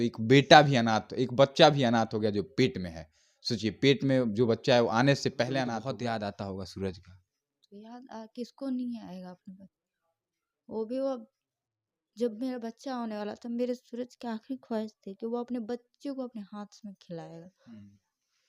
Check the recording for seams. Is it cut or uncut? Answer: cut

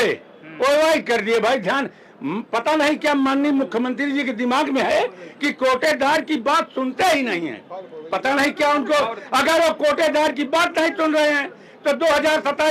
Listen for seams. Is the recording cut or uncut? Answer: uncut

